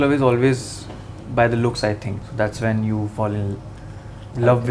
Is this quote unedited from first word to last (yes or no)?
no